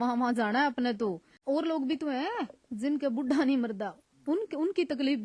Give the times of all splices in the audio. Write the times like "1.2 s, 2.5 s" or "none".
1.3 s